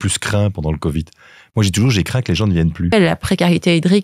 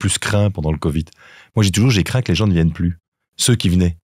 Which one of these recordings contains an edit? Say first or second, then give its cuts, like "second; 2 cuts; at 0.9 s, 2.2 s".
first; 1 cut; at 2.9 s